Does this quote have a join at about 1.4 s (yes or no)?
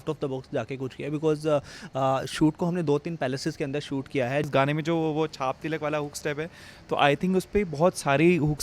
no